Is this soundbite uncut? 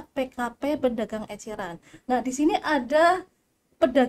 yes; 0 cuts

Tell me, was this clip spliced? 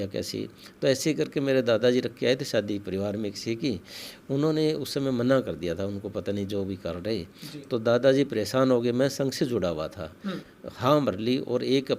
yes; 1 cut; at 10.5 s

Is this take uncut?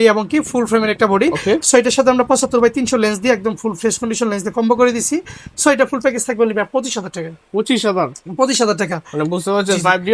yes; 0 cuts

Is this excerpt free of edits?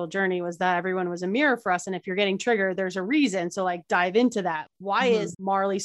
yes; 0 cuts

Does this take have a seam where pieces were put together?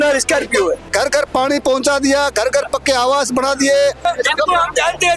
yes; 1 cut; at 0.9 s

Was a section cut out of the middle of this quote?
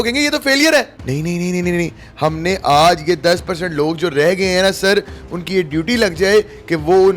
yes; 1 cut; at 1.0 s

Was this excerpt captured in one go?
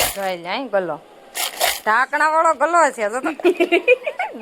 yes; 0 cuts

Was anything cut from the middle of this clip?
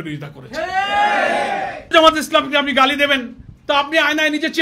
yes; 1 cut; at 1.9 s

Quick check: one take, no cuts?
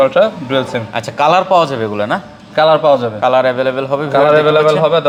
yes; 0 cuts

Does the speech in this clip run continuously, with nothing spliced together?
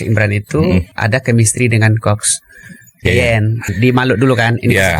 no; 2 cuts; at 0.9 s, 3.6 s

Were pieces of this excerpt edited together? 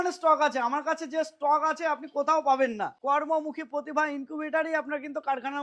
yes; 1 cut; at 3.0 s

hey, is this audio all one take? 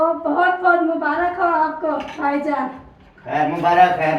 yes; 0 cuts

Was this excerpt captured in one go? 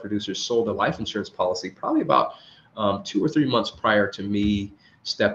yes; 0 cuts

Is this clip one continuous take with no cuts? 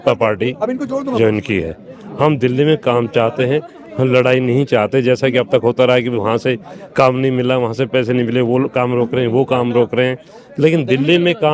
yes; 0 cuts

